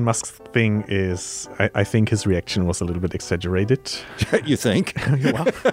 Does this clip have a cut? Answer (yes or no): no